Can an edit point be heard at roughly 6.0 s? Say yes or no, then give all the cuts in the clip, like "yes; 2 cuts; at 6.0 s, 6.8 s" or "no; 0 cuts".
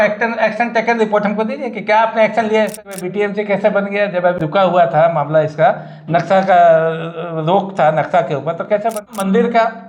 no; 3 cuts; at 3.0 s, 4.4 s, 9.1 s